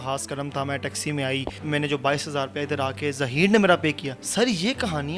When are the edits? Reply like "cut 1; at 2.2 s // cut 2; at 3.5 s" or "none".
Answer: cut 1; at 1.5 s // cut 2; at 4.1 s